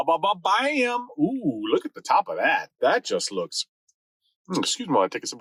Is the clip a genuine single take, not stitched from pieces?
yes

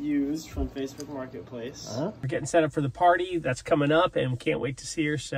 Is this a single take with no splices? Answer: no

